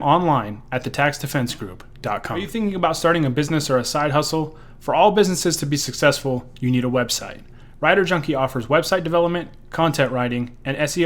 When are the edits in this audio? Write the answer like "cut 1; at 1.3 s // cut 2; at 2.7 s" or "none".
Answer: cut 1; at 2.5 s